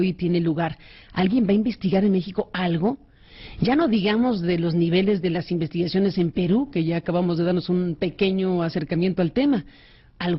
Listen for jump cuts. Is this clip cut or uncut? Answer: cut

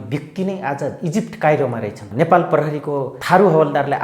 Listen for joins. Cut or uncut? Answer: cut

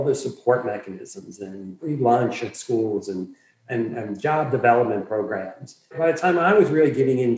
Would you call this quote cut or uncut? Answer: cut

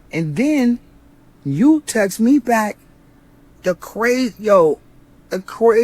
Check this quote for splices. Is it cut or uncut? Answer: uncut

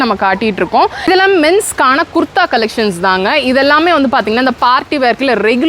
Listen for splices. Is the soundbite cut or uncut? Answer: cut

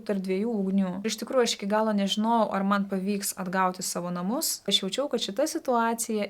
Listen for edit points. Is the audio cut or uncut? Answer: cut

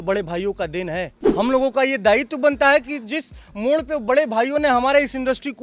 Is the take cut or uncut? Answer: cut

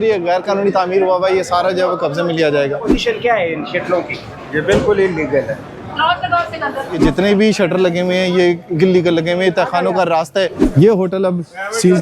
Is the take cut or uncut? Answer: cut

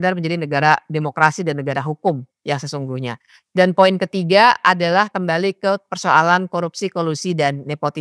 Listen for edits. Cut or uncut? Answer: uncut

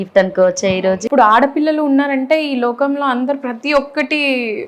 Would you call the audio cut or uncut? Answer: cut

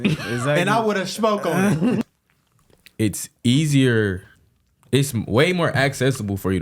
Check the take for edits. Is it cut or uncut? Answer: cut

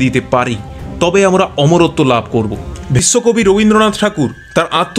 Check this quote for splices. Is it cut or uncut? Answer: cut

